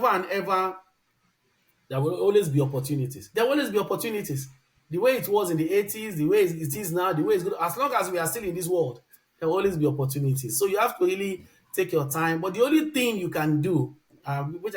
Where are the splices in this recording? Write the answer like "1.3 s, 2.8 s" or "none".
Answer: none